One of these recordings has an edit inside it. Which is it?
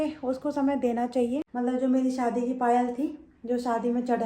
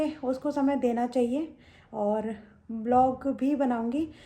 first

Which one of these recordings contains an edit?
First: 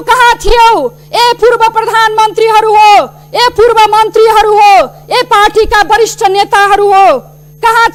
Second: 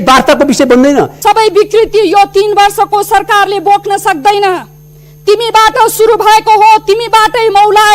second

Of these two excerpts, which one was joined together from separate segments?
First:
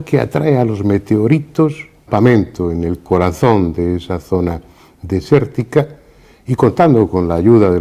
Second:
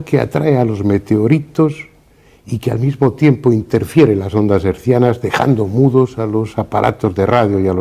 second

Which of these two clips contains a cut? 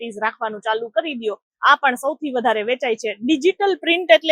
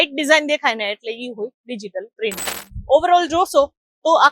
second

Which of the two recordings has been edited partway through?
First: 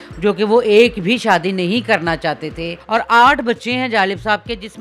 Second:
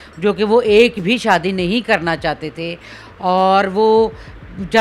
first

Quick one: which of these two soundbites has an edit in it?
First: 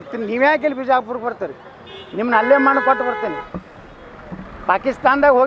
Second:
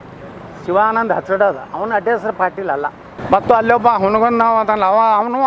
second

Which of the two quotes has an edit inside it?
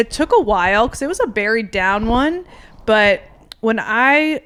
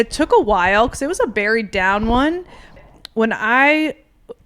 second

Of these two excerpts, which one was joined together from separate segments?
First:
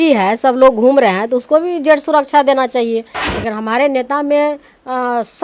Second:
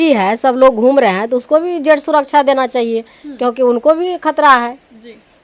first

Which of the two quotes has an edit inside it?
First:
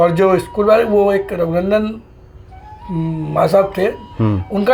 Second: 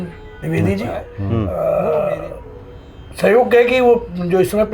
second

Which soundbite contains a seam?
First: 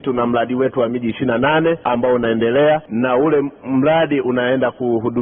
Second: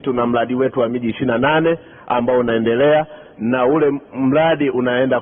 first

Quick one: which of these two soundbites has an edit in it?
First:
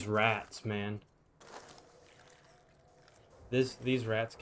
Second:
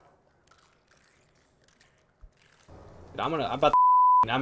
second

